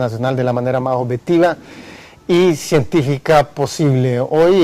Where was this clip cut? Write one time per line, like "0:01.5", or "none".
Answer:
0:02.1

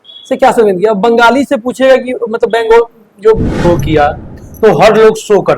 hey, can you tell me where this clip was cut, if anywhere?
0:03.6

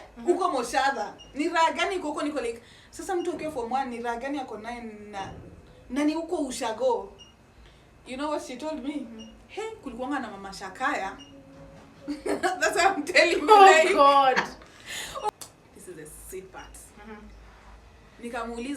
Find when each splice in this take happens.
0:15.3

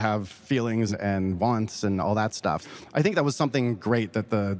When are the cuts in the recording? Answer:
0:00.9
0:02.6

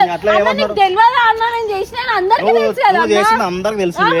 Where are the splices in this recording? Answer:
none

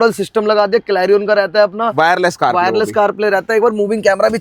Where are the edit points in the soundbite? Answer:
none

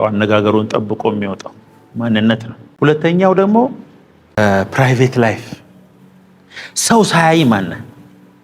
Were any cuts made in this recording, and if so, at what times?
0:02.6
0:04.4

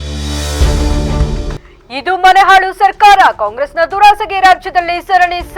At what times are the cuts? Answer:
0:01.6

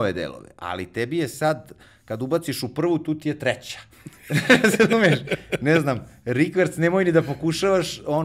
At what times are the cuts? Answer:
none

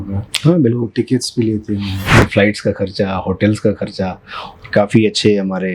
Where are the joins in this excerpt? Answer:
0:02.2

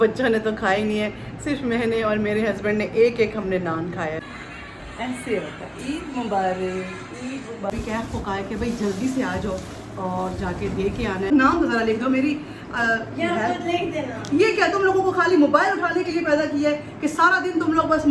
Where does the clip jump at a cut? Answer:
0:04.2
0:07.7
0:11.3

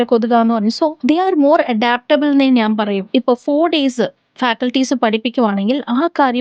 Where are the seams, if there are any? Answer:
0:01.0
0:03.0

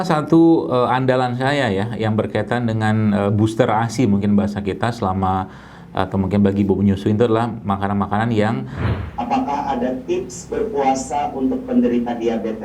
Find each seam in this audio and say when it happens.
0:08.9

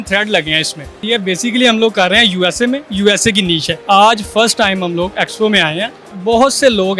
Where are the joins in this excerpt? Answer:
0:01.0
0:03.7
0:06.1

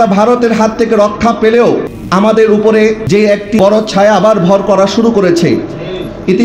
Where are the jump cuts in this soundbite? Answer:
0:01.9
0:03.4

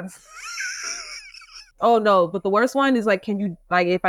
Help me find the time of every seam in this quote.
0:01.8

